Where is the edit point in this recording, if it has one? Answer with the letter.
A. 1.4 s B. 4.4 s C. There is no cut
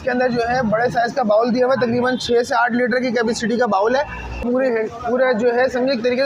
B